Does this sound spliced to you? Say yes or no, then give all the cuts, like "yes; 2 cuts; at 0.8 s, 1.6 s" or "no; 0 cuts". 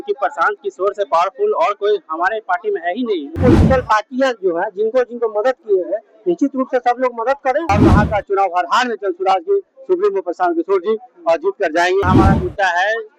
yes; 3 cuts; at 3.4 s, 7.7 s, 12.1 s